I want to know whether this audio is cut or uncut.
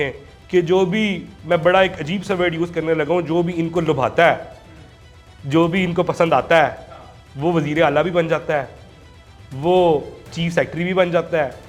uncut